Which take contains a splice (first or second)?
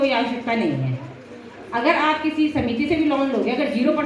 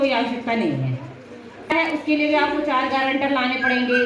second